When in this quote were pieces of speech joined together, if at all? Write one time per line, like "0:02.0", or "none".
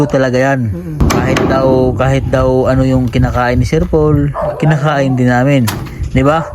0:01.0

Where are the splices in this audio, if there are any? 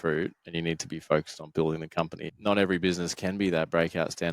0:02.2

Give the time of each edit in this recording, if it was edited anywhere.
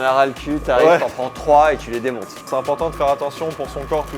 0:02.5

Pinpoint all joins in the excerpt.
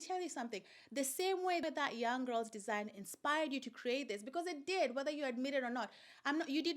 0:01.6

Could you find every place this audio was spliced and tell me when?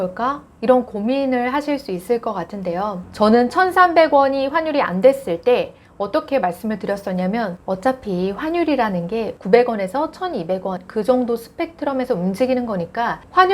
0:03.0

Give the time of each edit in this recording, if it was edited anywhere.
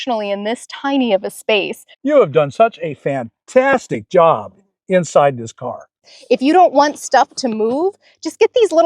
0:01.9
0:06.1

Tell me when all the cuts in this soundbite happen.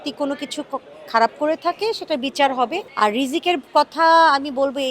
0:02.8

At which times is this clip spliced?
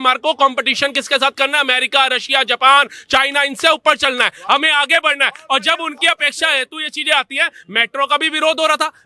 none

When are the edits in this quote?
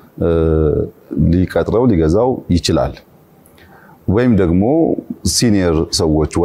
none

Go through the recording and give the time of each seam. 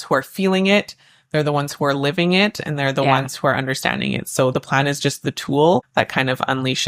0:05.9

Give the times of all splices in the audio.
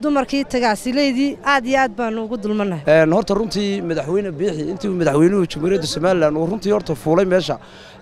0:02.8

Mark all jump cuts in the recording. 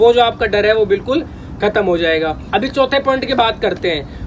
none

